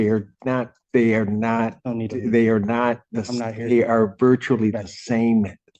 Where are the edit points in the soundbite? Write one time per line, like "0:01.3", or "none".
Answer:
none